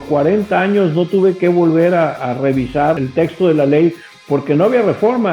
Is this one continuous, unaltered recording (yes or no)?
no